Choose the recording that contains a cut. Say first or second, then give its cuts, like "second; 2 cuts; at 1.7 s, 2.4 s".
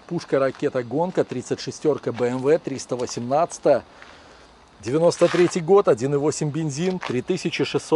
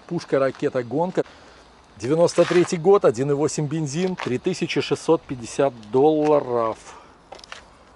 second; 1 cut; at 1.4 s